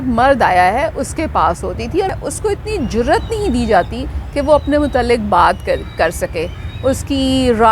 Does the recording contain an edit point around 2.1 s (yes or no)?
yes